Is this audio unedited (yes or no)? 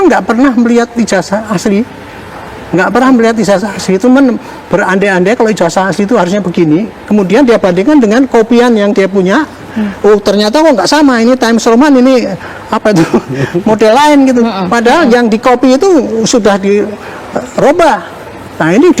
yes